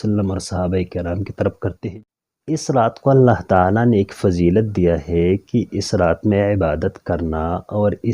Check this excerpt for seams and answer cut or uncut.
cut